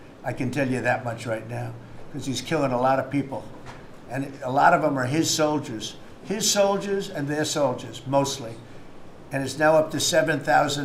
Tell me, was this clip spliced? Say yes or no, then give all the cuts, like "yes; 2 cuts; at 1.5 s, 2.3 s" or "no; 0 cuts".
no; 0 cuts